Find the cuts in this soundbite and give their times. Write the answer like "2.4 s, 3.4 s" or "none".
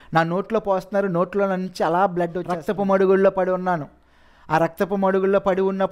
2.5 s